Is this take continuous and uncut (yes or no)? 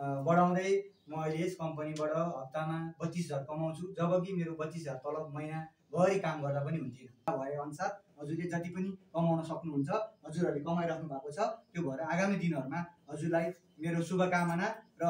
no